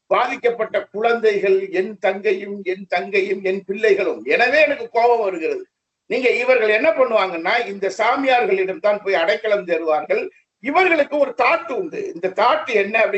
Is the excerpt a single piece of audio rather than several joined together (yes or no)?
yes